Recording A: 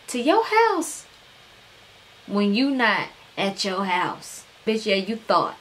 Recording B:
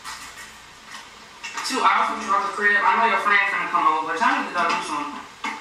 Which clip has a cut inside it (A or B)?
A